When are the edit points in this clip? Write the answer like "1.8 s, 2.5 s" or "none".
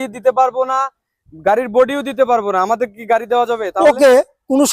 none